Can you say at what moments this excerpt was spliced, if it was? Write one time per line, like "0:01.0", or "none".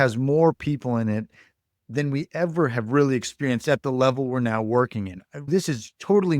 0:05.5